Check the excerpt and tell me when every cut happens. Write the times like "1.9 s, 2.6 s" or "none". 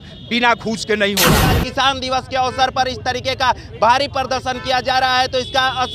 1.6 s